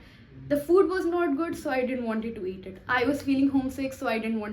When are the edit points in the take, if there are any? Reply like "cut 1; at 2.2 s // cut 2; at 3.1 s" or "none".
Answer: none